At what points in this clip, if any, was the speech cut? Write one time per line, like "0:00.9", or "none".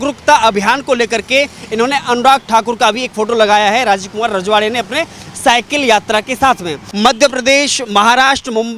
0:06.8